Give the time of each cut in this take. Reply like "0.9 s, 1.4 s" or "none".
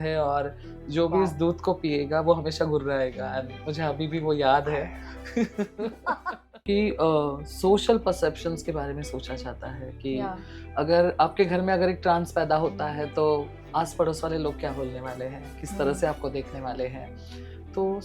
6.6 s